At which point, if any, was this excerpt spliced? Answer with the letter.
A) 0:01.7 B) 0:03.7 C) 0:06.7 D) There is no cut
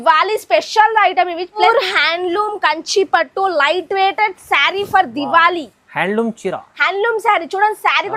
A